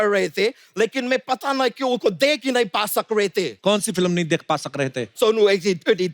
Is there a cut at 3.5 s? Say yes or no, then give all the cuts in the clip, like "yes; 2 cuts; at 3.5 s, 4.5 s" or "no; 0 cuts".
yes; 2 cuts; at 3.5 s, 5.1 s